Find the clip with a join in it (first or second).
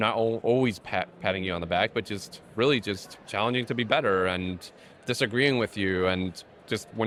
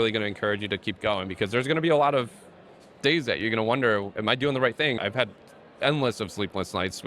second